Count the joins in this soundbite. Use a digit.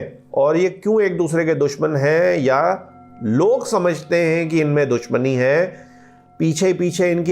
0